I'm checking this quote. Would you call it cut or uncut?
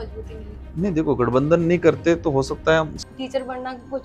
cut